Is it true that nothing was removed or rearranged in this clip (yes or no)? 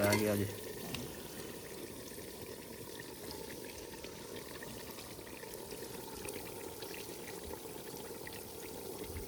yes